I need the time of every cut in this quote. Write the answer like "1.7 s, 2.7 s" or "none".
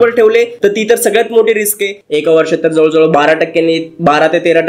2.0 s